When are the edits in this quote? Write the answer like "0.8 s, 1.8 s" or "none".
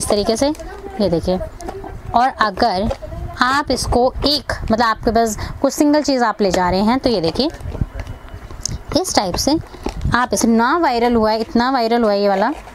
10.4 s